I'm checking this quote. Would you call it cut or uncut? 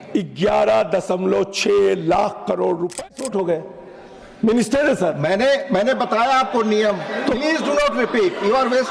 cut